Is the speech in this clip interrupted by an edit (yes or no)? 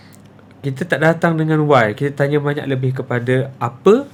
no